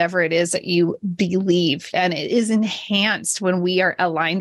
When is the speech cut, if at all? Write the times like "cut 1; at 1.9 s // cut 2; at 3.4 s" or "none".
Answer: cut 1; at 1.8 s

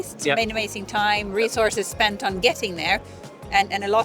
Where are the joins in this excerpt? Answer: none

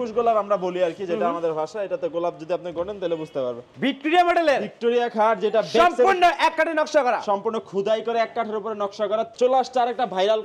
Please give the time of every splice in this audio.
cut 1; at 3.7 s // cut 2; at 9.3 s

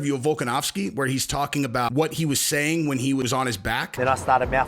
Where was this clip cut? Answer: cut 1; at 1.9 s // cut 2; at 3.3 s

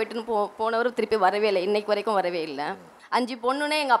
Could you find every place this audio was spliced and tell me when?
cut 1; at 2.8 s

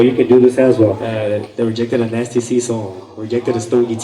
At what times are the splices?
cut 1; at 1.1 s

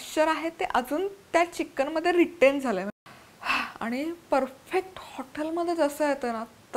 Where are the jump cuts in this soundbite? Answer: cut 1; at 2.9 s

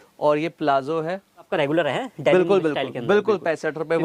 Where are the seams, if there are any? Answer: cut 1; at 1.5 s

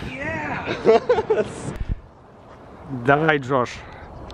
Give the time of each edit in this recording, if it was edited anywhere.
none

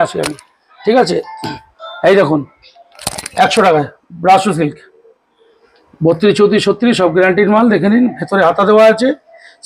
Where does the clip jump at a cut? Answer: none

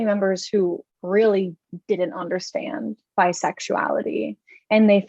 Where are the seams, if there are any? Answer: cut 1; at 0.9 s

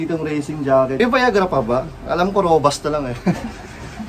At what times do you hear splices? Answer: cut 1; at 0.9 s

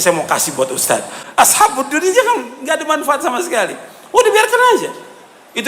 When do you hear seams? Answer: cut 1; at 1.2 s

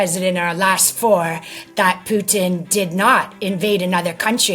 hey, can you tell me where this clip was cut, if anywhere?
none

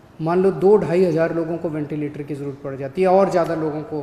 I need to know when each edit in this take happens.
none

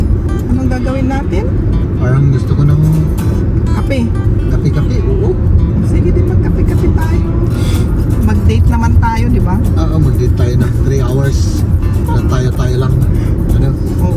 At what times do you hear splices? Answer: none

